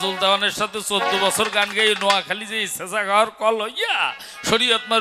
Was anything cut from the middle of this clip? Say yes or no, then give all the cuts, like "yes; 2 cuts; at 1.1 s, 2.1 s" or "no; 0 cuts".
no; 0 cuts